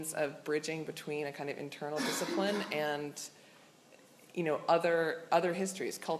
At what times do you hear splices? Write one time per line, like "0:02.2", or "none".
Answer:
none